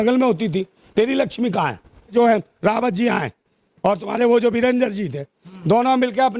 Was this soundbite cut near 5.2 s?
no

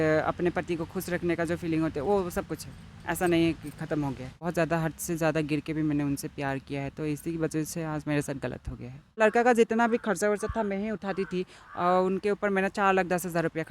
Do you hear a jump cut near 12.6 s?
no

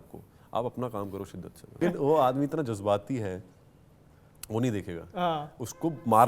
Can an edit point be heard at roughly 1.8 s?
yes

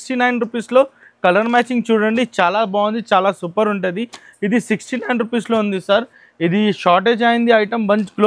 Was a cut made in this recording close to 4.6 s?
no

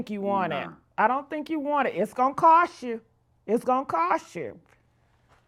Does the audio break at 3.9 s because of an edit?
no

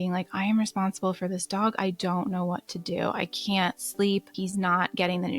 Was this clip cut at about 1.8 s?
no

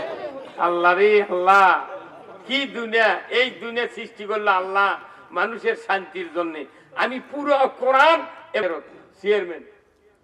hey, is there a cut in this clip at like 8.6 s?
yes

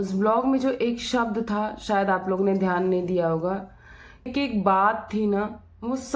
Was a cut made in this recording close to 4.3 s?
yes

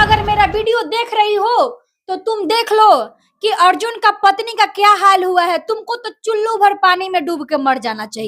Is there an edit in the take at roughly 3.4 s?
no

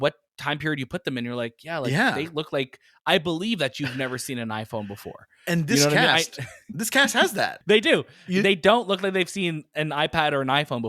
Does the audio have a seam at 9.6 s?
no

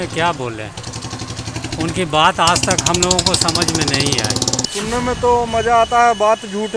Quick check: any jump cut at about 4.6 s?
yes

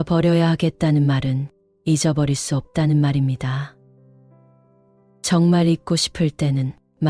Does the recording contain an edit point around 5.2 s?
yes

